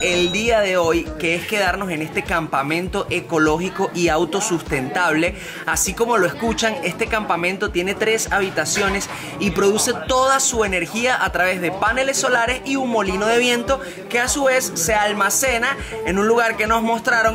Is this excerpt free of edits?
yes; 0 cuts

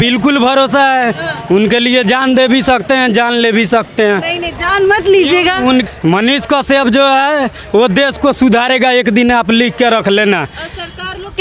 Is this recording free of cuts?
yes; 0 cuts

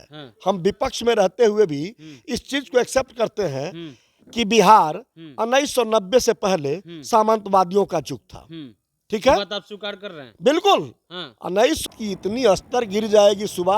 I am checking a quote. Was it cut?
yes; 1 cut; at 11.8 s

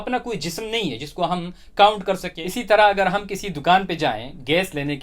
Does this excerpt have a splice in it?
yes; 1 cut; at 2.4 s

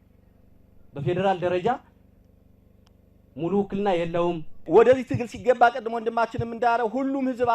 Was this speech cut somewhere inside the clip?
yes; 1 cut; at 4.7 s

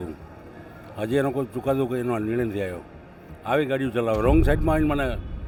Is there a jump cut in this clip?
no; 0 cuts

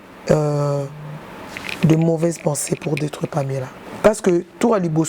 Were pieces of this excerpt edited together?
yes; 1 cut; at 3.8 s

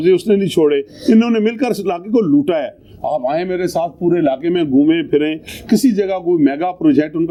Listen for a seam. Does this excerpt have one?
no; 0 cuts

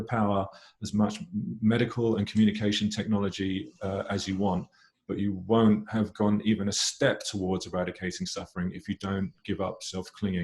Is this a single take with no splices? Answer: yes; 0 cuts

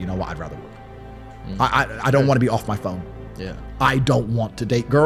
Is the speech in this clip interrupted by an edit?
no; 0 cuts

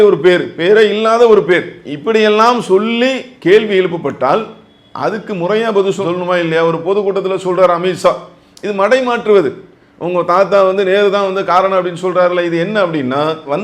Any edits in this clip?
no; 0 cuts

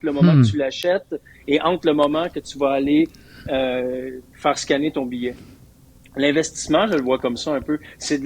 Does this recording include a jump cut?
no; 0 cuts

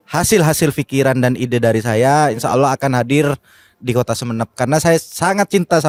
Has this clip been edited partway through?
no; 0 cuts

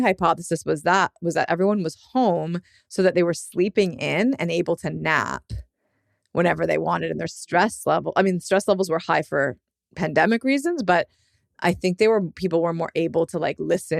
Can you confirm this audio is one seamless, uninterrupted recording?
yes; 0 cuts

